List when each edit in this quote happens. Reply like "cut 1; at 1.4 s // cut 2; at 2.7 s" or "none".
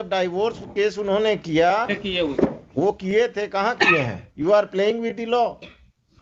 cut 1; at 4.2 s